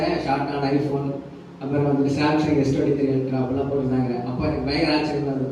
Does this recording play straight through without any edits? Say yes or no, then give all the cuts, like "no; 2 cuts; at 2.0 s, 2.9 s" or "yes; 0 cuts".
yes; 0 cuts